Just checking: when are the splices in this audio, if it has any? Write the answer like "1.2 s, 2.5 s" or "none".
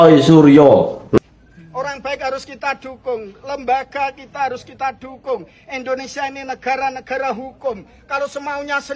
1.2 s